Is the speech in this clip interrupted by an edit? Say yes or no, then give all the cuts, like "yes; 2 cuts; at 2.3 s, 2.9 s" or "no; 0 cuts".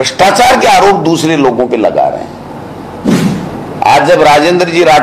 yes; 1 cut; at 3.1 s